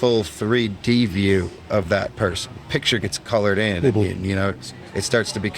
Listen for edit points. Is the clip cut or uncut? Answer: cut